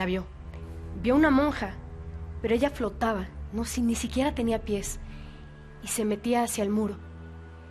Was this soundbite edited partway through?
no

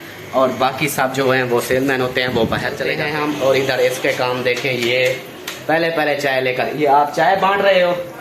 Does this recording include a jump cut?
yes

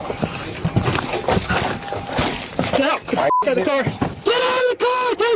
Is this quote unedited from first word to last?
no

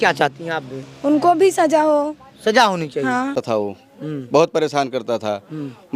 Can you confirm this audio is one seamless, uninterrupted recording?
no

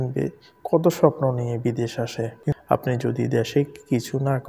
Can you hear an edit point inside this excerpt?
yes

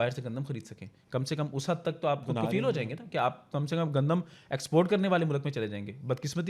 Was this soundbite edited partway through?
no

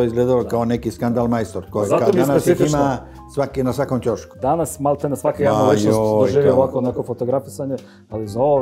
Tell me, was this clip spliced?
no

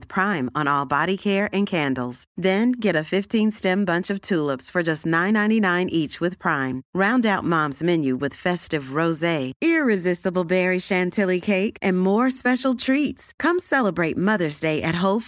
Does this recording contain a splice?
no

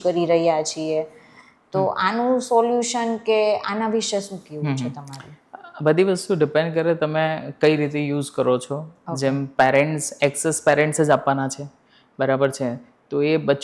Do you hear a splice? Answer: no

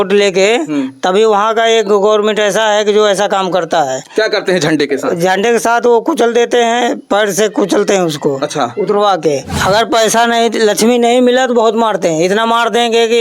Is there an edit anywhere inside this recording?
yes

